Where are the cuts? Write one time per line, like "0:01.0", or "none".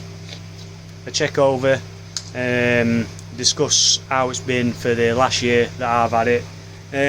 none